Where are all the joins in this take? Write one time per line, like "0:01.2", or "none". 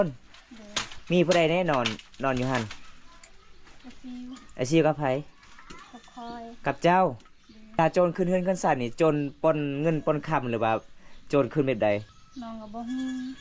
0:07.8
0:12.1